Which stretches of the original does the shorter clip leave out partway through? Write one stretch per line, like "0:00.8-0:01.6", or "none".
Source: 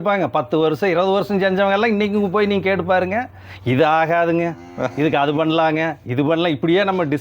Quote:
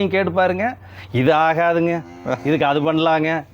none